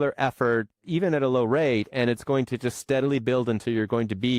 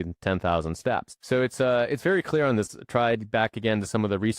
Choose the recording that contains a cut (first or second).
second